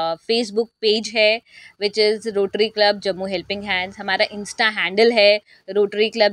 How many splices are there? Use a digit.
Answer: 0